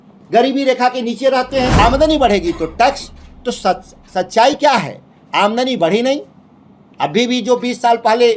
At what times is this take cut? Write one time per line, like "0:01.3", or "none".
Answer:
0:01.8